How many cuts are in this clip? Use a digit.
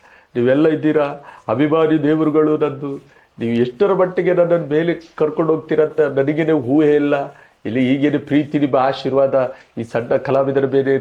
0